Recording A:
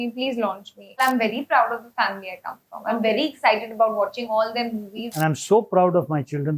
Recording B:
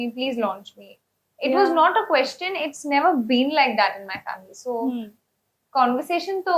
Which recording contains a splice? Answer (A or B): A